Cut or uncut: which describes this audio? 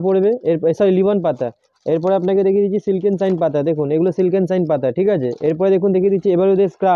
uncut